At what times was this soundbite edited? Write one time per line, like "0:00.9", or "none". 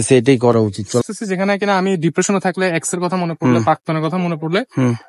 0:01.0